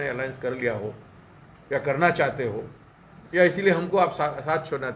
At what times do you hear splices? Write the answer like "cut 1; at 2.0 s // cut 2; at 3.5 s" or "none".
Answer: none